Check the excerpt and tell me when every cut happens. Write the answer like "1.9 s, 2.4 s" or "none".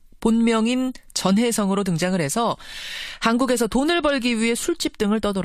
none